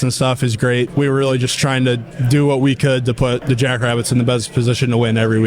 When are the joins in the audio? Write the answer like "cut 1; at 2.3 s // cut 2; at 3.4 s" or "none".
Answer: cut 1; at 0.9 s // cut 2; at 3.4 s

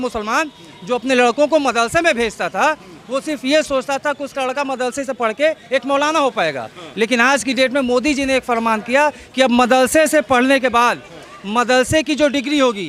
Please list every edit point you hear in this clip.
none

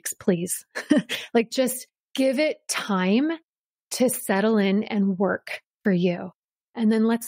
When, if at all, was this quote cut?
cut 1; at 2.1 s

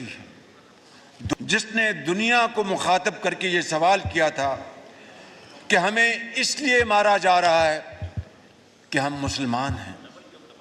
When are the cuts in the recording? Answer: cut 1; at 1.3 s

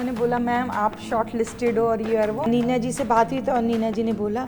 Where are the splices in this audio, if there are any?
cut 1; at 2.5 s

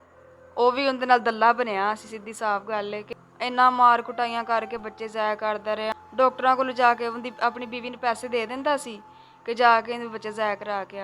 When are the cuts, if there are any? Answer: cut 1; at 3.1 s

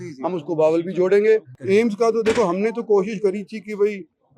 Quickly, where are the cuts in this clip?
cut 1; at 1.5 s

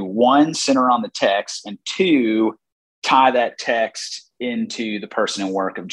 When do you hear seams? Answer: none

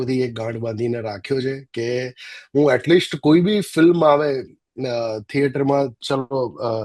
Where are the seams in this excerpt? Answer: none

